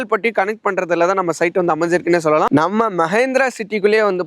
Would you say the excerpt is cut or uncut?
cut